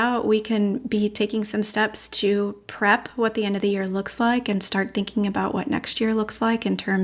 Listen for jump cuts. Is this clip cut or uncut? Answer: uncut